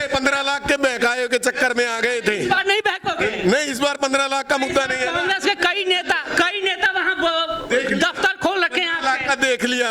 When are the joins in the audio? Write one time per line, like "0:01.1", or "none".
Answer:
none